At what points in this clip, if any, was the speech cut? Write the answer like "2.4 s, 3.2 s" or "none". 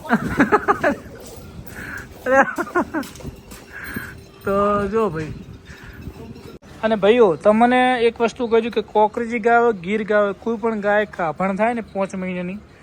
6.6 s

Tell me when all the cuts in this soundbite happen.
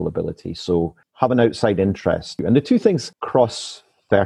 1.0 s, 2.3 s, 3.1 s

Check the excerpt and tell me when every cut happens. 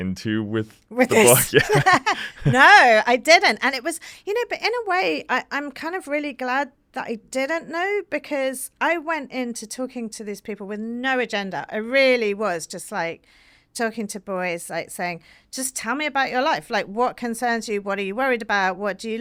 none

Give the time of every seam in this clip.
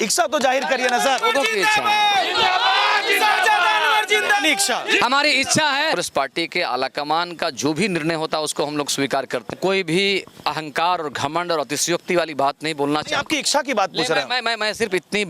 5.0 s, 5.9 s, 9.5 s

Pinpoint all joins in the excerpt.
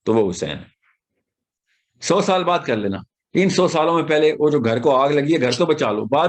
1.5 s

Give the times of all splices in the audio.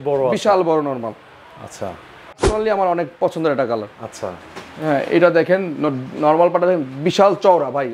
2.4 s

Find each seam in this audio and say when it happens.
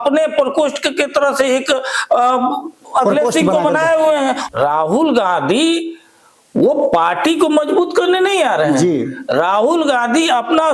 4.4 s

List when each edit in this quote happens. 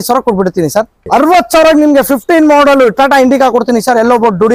1.0 s

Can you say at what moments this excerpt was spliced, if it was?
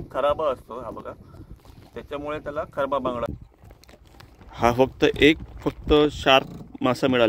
3.4 s

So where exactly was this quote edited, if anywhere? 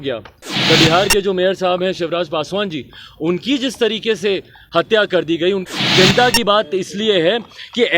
5.6 s

